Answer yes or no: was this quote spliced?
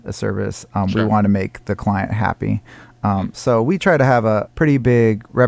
yes